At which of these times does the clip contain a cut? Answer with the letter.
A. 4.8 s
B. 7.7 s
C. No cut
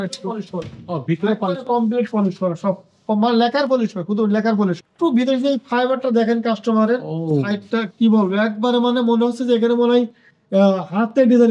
A